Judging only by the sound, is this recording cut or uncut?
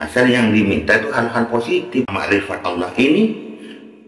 cut